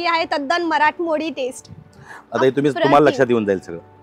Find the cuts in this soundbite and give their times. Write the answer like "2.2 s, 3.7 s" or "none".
2.1 s